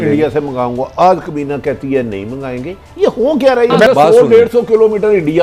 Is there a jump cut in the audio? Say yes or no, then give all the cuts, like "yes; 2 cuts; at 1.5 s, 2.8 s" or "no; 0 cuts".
yes; 1 cut; at 3.9 s